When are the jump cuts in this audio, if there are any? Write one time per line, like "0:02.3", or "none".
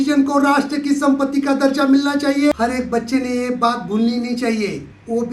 0:02.5